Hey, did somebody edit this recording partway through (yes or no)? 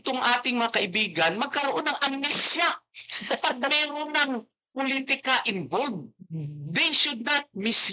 no